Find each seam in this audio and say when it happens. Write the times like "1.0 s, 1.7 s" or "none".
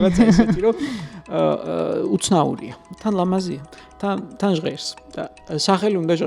2.9 s